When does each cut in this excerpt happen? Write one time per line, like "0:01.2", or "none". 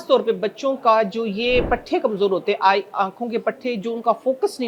none